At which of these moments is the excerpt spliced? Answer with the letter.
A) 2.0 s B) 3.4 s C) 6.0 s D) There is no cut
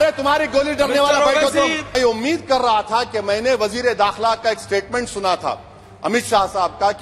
A